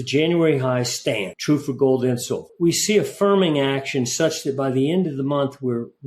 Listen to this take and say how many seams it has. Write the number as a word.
two